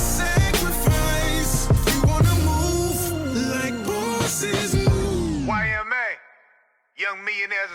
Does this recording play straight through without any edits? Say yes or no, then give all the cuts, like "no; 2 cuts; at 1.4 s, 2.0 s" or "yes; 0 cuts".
yes; 0 cuts